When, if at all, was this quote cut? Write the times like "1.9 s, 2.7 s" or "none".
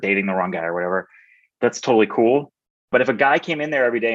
1.5 s, 2.9 s